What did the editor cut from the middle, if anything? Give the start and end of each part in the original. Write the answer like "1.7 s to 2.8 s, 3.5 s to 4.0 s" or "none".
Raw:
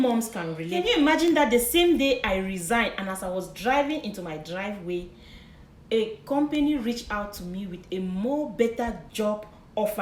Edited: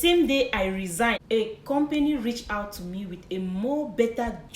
2.9 s to 5.8 s